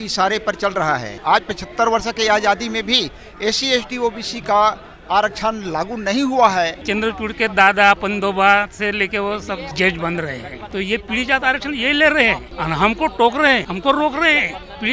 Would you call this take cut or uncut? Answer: cut